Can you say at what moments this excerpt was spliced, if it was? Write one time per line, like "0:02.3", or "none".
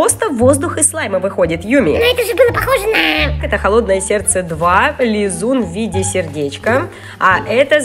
0:02.0
0:03.3